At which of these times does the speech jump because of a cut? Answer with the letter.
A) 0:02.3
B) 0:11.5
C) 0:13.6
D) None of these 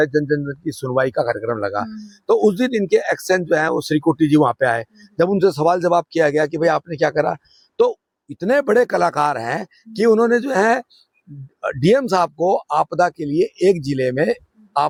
D